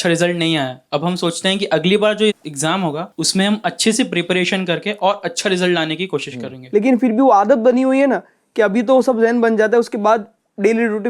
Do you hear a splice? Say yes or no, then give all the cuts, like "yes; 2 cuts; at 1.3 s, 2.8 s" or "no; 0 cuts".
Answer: yes; 2 cuts; at 3.1 s, 6.6 s